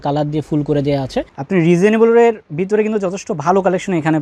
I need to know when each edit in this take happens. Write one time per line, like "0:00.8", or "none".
0:01.3